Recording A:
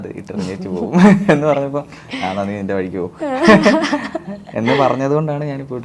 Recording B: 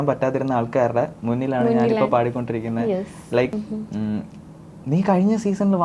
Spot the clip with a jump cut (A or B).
B